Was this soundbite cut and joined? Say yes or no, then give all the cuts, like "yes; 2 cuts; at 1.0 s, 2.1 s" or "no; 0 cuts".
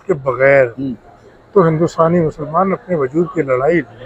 no; 0 cuts